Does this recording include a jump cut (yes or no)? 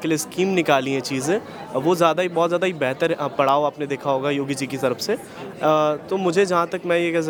no